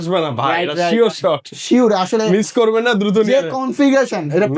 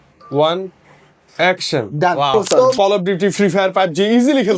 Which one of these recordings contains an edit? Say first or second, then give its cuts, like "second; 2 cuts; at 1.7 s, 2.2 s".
second; 1 cut; at 2.7 s